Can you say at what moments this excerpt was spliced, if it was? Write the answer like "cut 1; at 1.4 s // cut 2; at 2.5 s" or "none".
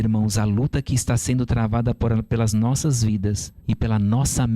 cut 1; at 3.5 s